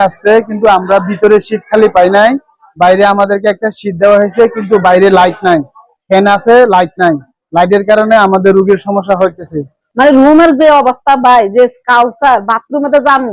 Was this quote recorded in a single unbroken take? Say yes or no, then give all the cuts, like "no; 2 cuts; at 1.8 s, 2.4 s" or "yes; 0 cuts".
no; 1 cut; at 9.8 s